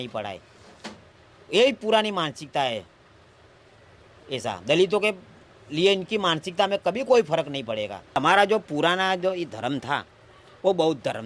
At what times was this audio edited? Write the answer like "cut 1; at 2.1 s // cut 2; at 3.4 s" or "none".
cut 1; at 8.2 s